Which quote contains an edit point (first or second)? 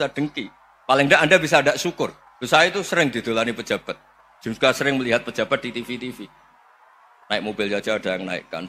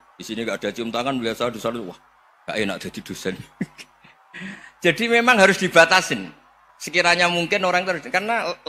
first